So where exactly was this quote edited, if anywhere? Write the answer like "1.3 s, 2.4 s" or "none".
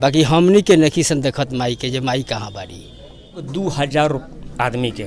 3.5 s

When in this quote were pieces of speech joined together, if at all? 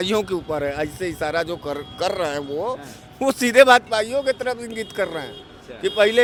none

